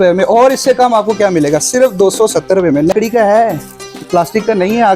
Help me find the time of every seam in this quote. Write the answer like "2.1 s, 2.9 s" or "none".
2.9 s